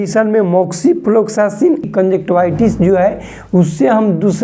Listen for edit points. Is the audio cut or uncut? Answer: cut